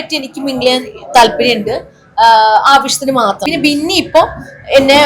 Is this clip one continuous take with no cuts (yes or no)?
no